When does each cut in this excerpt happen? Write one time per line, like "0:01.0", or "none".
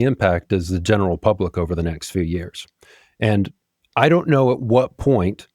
none